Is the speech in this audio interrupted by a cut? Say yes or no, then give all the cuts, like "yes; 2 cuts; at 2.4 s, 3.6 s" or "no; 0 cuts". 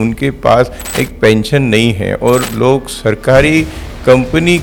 no; 0 cuts